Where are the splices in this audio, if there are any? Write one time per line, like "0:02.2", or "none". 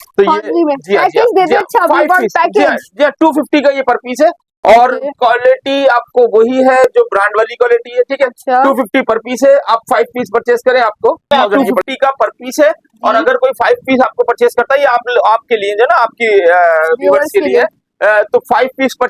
0:11.3